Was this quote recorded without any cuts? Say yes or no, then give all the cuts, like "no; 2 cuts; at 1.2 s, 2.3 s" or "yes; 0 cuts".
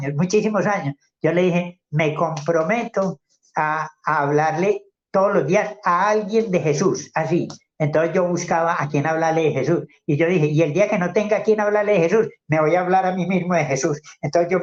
yes; 0 cuts